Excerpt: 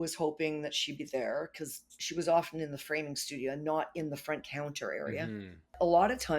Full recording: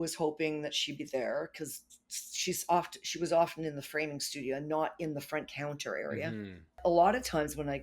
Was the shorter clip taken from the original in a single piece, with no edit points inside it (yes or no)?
no